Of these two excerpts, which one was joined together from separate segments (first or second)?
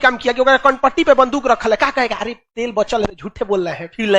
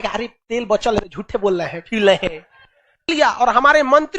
second